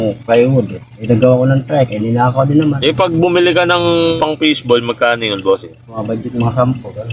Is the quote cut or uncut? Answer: cut